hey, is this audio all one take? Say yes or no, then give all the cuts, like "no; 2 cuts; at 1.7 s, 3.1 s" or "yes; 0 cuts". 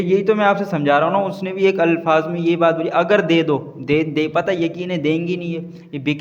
yes; 0 cuts